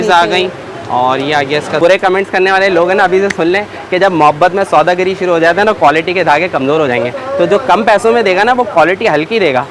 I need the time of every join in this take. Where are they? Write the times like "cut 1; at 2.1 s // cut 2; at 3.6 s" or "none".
cut 1; at 1.8 s